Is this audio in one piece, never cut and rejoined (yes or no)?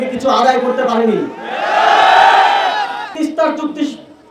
no